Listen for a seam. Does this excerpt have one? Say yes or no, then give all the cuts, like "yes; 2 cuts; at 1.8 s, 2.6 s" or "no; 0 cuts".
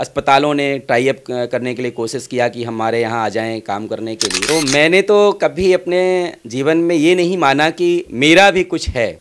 yes; 1 cut; at 4.4 s